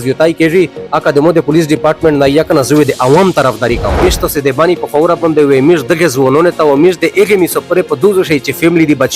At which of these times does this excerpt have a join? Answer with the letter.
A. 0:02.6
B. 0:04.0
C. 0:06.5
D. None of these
B